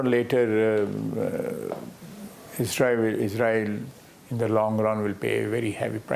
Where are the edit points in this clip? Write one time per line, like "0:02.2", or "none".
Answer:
none